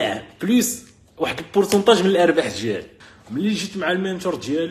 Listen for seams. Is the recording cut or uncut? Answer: cut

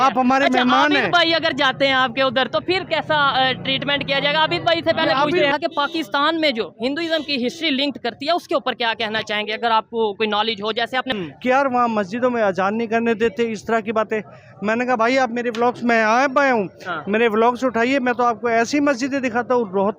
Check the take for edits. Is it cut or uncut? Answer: cut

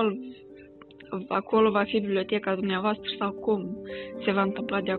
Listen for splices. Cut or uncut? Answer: uncut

